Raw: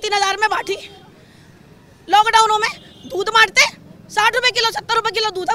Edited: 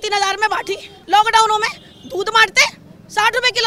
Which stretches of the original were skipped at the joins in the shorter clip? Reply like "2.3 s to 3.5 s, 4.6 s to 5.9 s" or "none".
0.9 s to 1.9 s